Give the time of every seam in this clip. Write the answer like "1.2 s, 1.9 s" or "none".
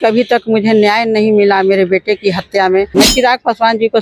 2.9 s